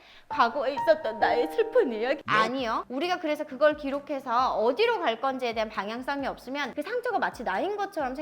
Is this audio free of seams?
no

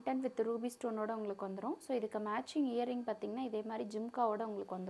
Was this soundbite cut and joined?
no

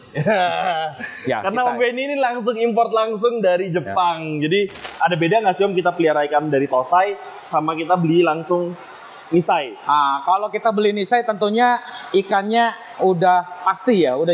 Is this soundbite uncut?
no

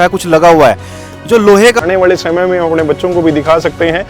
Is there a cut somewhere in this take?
yes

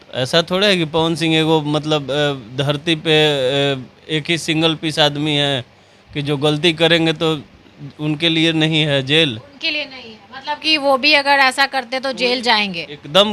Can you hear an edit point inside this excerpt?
no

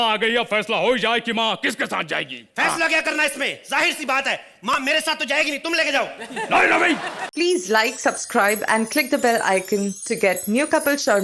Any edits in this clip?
yes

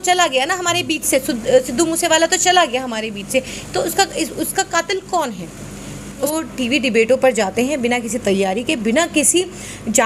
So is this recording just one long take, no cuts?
no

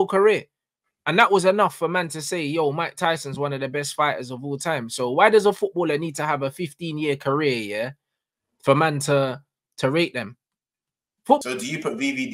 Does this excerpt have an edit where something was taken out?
yes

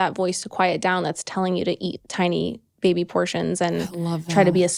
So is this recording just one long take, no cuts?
yes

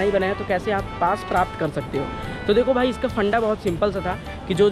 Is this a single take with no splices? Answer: yes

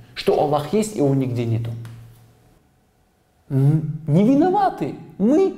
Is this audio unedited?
no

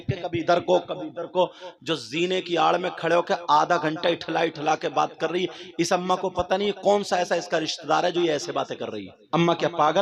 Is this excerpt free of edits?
no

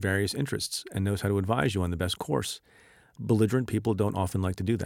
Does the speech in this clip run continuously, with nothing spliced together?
yes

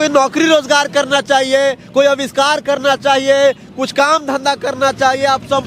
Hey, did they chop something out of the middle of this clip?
no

